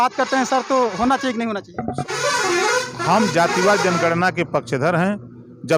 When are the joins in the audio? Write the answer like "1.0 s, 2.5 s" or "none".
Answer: 2.0 s